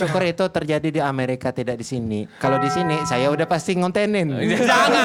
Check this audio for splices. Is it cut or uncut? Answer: uncut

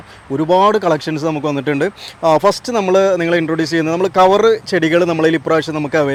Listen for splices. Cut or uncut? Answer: uncut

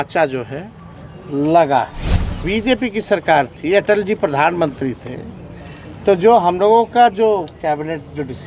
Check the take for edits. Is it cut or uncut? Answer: cut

